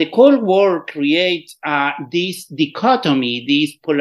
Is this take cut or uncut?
uncut